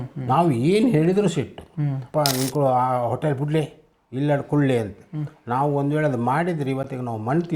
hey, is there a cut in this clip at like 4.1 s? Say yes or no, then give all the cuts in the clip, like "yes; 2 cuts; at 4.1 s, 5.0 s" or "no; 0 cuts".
no; 1 cut; at 2.0 s